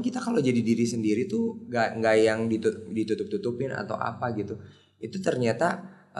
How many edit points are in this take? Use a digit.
1